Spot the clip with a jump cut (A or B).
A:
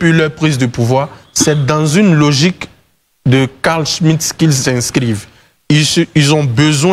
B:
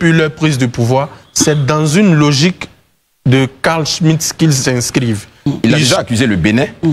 B